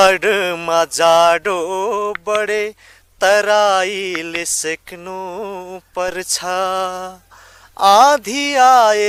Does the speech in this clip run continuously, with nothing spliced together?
yes; 0 cuts

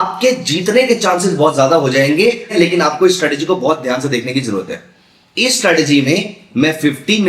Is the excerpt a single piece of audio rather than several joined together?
no; 1 cut; at 2.5 s

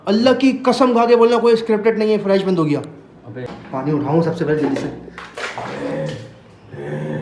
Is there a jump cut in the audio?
yes; 1 cut; at 3.5 s

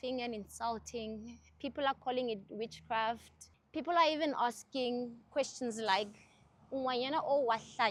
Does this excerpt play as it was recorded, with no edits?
yes; 0 cuts

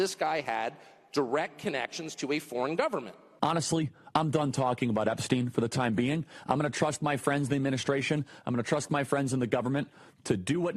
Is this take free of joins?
no; 1 cut; at 3.3 s

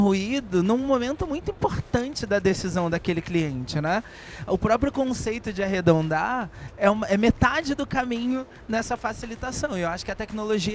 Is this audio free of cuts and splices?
yes; 0 cuts

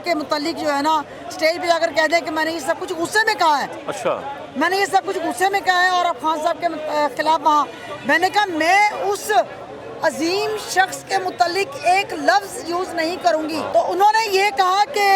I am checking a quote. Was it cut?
yes; 1 cut; at 13.7 s

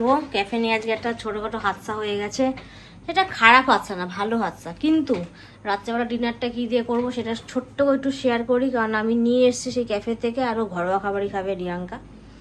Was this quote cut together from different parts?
no; 0 cuts

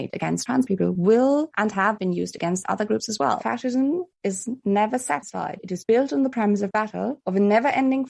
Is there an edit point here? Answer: yes; 2 cuts; at 3.4 s, 7.2 s

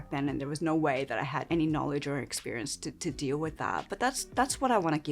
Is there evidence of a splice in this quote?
yes; 1 cut; at 1.4 s

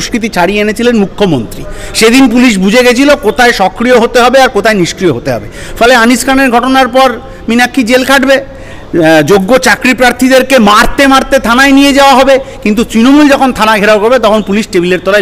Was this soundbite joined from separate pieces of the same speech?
no; 0 cuts

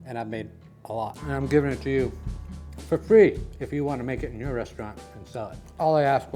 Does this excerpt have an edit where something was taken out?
yes; 1 cut; at 1.2 s

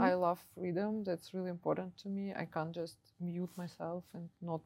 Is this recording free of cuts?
yes; 0 cuts

